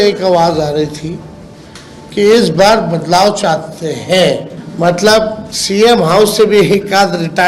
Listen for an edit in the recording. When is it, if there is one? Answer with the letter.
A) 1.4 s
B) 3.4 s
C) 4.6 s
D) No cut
C